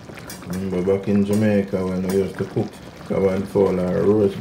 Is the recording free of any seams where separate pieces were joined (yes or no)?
no